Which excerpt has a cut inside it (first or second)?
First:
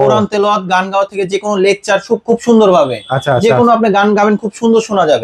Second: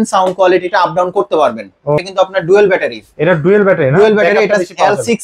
second